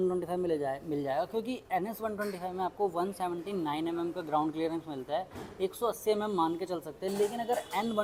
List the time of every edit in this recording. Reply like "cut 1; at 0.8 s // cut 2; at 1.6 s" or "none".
none